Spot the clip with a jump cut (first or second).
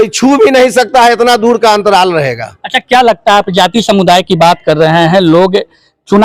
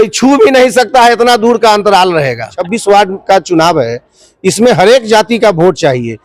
second